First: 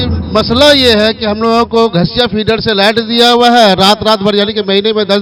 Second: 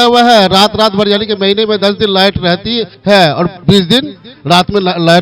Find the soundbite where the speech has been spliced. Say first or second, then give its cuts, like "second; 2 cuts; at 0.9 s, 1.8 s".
second; 2 cuts; at 2.9 s, 3.6 s